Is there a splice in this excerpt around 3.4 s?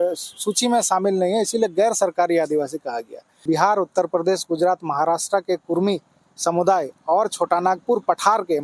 yes; 1 cut; at 3.4 s

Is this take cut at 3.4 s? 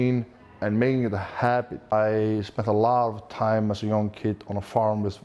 no; 1 cut; at 1.9 s

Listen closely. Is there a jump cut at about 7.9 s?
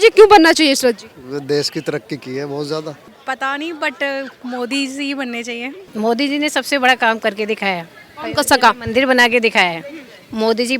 no; 2 cuts; at 3.0 s, 5.8 s

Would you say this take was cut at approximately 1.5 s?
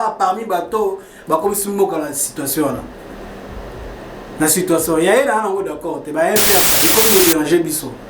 no; 1 cut; at 6.7 s

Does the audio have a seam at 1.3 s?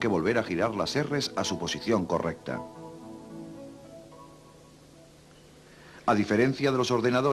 yes; 1 cut; at 1.3 s

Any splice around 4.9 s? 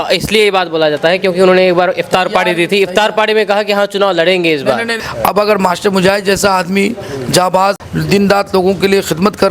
yes; 2 cuts; at 4.9 s, 7.9 s

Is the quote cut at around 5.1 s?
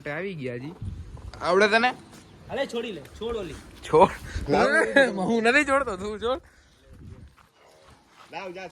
no; 0 cuts

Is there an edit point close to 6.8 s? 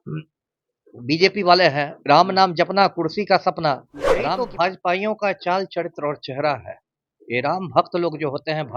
no; 1 cut; at 4.2 s

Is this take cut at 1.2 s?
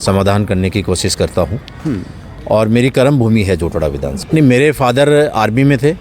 no; 1 cut; at 4.1 s

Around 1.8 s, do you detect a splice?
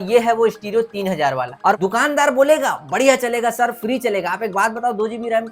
yes; 1 cut; at 1.8 s

